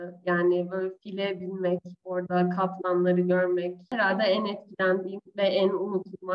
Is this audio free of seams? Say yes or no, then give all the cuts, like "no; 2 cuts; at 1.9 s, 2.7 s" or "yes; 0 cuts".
no; 1 cut; at 3.9 s